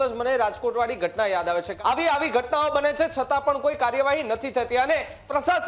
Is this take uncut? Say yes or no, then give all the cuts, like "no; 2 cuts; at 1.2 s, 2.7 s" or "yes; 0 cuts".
no; 1 cut; at 1.7 s